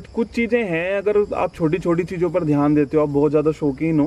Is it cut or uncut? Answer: uncut